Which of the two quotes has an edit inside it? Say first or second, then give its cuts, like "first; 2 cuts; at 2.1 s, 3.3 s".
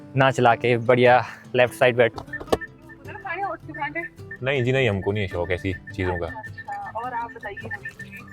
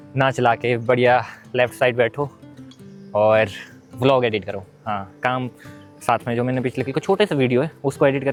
first; 1 cut; at 2.1 s